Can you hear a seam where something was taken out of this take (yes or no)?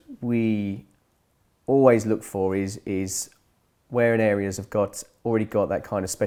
no